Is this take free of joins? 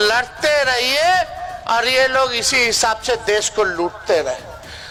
yes; 0 cuts

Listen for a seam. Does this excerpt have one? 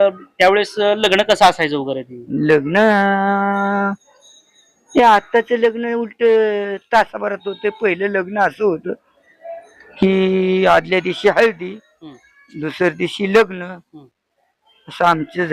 no; 0 cuts

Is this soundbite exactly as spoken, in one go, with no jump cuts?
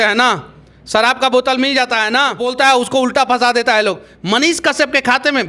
no; 1 cut; at 2.5 s

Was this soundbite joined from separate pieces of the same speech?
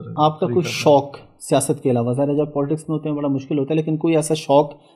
no; 0 cuts

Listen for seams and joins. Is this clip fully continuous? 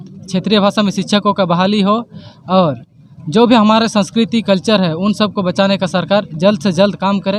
yes; 0 cuts

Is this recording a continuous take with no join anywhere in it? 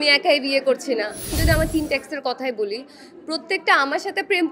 no; 1 cut; at 1.3 s

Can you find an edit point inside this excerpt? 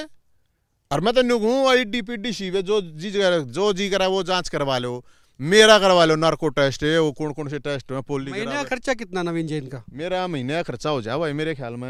no; 0 cuts

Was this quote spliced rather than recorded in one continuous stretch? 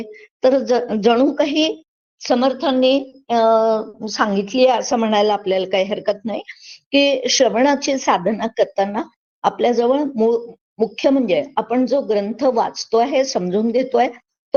no; 0 cuts

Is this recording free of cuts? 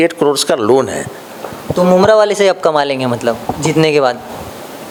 yes; 0 cuts

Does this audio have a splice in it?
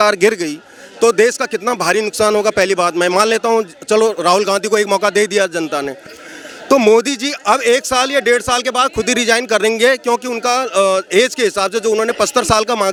no; 0 cuts

